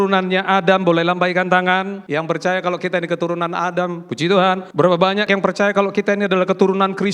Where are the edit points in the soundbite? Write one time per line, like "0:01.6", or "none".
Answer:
0:02.0
0:05.1

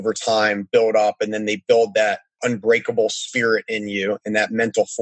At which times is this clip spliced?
0:02.4

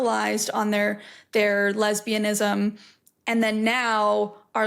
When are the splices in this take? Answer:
none

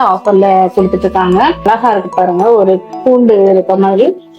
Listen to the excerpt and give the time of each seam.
0:01.6

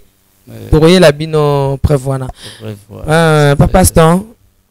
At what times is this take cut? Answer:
none

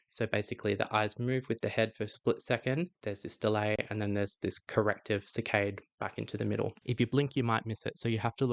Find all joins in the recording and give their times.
0:03.0
0:06.8

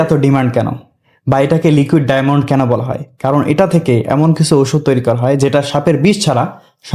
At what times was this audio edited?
none

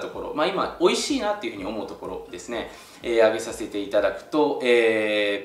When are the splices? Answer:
none

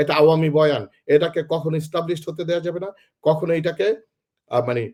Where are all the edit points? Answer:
none

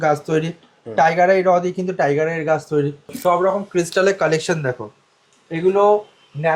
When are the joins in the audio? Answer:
0:03.1

